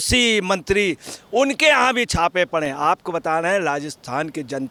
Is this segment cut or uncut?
uncut